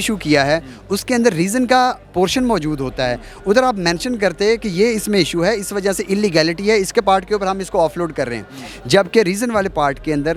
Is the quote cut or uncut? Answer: uncut